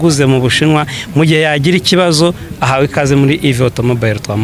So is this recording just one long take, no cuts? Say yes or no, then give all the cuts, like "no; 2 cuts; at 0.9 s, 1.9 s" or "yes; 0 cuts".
yes; 0 cuts